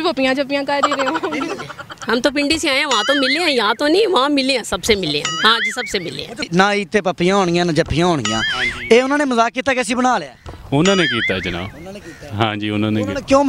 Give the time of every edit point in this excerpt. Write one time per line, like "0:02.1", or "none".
0:01.6
0:06.4